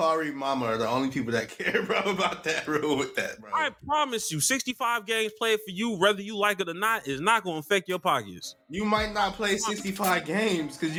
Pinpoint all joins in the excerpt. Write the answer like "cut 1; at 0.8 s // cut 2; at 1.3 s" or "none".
none